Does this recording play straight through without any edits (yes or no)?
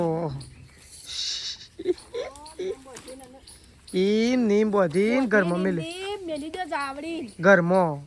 yes